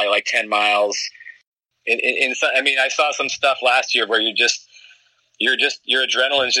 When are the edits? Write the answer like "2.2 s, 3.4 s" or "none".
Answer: 1.6 s